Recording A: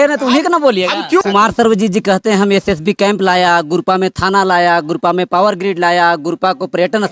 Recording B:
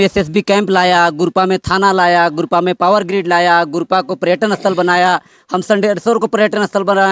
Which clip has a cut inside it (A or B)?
A